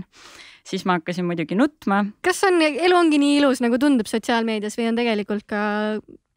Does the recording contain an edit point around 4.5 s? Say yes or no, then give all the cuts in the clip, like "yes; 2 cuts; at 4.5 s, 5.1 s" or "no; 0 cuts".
no; 1 cut; at 2.2 s